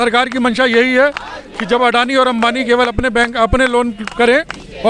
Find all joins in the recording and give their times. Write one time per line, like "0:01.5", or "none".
none